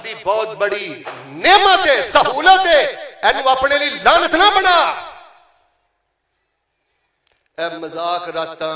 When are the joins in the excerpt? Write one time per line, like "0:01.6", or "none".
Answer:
none